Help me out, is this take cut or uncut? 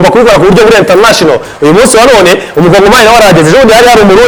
uncut